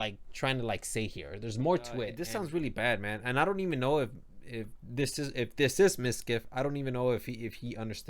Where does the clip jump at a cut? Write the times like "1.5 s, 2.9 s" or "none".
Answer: 2.2 s